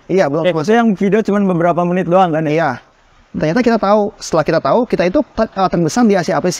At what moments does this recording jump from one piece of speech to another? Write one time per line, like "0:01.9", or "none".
0:02.9